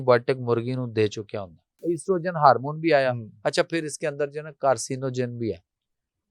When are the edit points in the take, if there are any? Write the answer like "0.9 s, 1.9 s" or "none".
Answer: 1.8 s